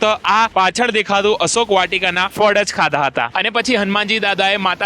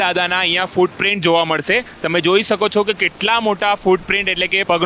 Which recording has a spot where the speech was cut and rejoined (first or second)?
first